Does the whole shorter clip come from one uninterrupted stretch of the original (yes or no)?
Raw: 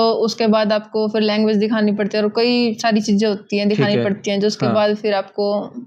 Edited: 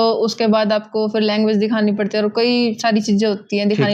yes